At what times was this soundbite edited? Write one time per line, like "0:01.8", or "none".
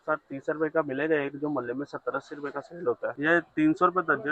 0:03.1